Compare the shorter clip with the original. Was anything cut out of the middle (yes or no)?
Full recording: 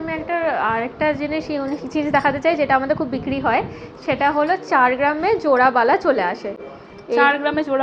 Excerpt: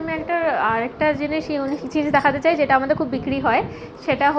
no